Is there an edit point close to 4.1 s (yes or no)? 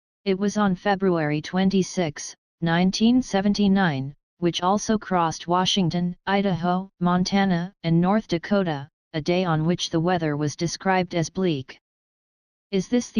yes